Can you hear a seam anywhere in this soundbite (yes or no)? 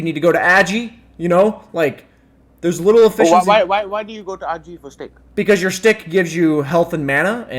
no